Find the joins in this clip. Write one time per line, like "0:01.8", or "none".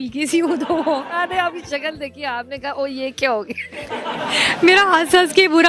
0:01.2
0:04.2

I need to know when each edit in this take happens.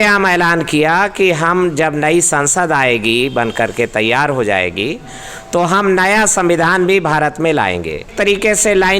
0:08.1

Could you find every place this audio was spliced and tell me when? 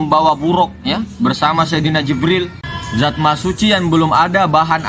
0:02.6

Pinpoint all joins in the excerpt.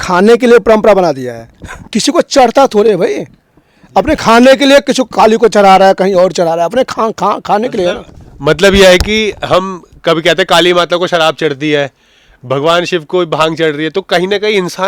0:01.9

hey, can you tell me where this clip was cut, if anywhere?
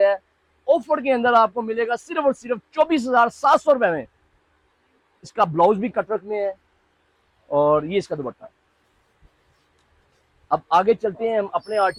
none

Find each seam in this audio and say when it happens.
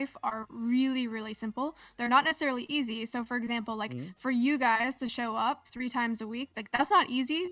none

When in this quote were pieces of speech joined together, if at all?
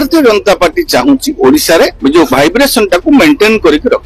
0:01.9

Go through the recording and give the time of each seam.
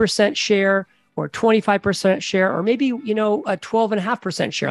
none

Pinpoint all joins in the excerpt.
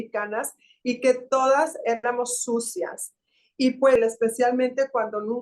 0:04.0

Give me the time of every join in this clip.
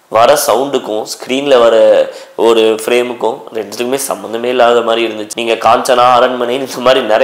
0:05.3

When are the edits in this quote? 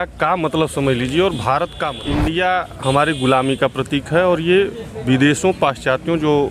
0:01.9

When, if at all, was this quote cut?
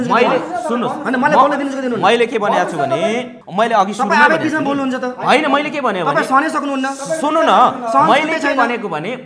0:03.4

